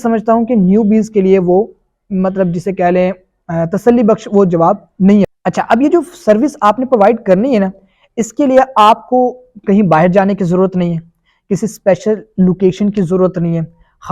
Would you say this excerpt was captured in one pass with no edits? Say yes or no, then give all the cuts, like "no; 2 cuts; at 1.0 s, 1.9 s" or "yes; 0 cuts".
no; 1 cut; at 5.3 s